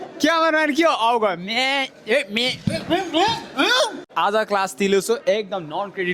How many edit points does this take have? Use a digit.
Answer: 1